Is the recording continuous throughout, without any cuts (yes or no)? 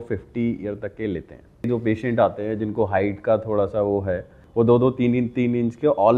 no